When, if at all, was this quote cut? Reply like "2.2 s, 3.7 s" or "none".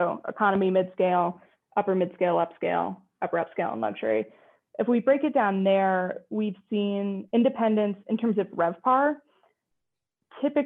7.2 s